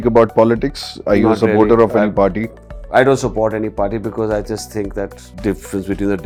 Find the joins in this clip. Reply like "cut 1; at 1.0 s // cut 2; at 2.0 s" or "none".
none